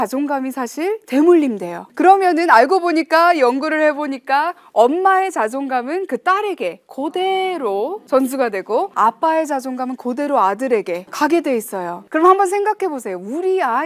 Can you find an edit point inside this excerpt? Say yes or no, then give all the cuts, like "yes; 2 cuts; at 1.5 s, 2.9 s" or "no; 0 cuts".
yes; 5 cuts; at 1.8 s, 8.0 s, 8.9 s, 11.1 s, 12.0 s